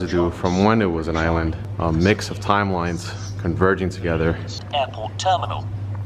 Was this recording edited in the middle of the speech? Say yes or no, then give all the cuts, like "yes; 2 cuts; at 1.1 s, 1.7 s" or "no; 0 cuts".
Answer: yes; 2 cuts; at 1.6 s, 4.6 s